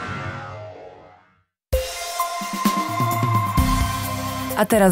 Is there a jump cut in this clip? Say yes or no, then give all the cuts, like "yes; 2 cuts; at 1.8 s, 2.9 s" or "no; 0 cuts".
no; 0 cuts